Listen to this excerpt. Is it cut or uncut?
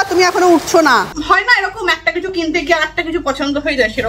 cut